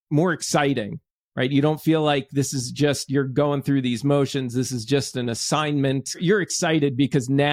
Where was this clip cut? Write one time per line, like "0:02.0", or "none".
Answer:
0:06.2